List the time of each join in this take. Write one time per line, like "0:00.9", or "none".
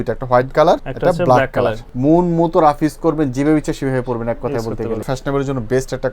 0:00.9
0:01.9
0:05.1